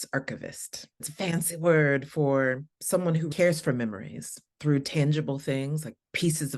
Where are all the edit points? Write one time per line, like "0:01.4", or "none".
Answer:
0:01.1
0:03.3